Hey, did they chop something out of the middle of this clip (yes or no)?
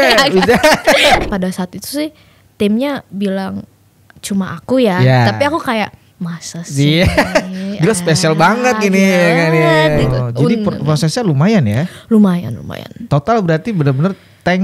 yes